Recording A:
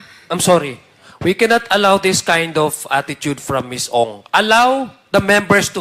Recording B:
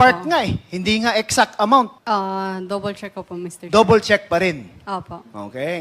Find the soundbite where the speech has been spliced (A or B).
B